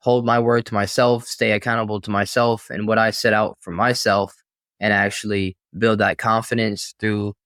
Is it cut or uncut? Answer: uncut